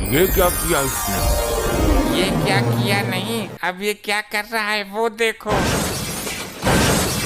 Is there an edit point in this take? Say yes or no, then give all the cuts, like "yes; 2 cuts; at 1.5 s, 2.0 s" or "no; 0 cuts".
no; 0 cuts